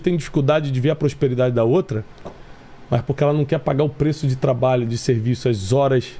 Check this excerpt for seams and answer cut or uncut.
uncut